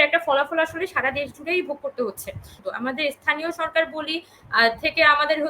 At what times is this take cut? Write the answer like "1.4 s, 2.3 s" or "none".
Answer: 2.6 s